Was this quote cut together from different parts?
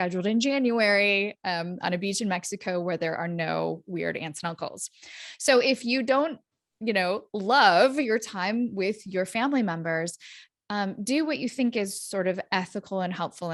no; 0 cuts

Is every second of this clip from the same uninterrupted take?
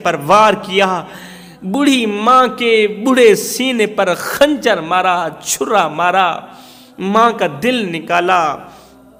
yes; 0 cuts

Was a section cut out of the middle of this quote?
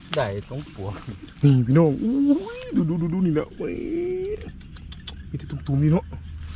no; 0 cuts

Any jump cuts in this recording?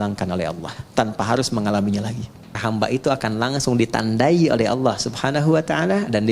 yes; 1 cut; at 2.5 s

